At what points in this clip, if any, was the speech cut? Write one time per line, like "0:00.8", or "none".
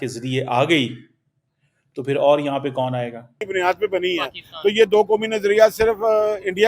0:03.4